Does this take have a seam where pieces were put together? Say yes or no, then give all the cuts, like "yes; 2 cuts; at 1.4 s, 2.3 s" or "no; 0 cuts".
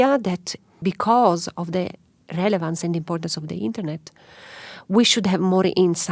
no; 0 cuts